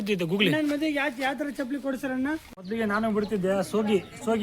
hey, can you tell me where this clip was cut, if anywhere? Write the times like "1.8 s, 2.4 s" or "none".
2.5 s